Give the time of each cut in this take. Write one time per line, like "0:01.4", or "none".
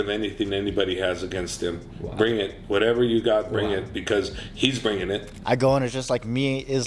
0:05.3